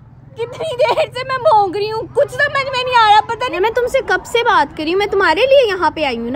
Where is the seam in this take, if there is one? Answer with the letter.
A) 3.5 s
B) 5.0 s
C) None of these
A